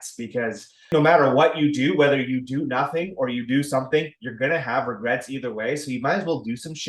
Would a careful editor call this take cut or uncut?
cut